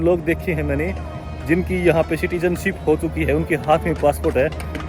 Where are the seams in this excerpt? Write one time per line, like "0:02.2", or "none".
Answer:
none